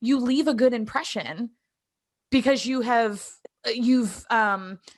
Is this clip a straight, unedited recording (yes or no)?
yes